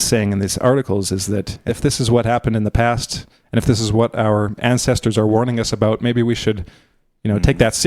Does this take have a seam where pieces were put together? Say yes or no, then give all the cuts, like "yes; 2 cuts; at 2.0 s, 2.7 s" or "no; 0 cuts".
yes; 1 cut; at 1.7 s